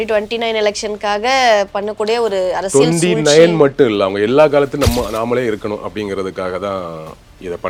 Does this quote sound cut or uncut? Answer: uncut